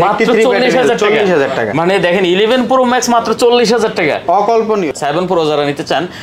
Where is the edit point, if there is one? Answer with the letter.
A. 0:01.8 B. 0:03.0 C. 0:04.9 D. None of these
C